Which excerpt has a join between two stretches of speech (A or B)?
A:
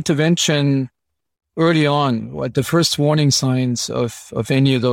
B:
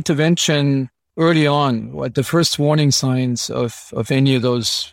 B